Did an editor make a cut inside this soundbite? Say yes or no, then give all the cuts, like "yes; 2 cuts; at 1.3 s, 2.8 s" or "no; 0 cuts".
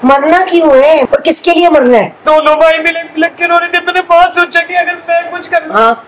yes; 2 cuts; at 1.1 s, 2.2 s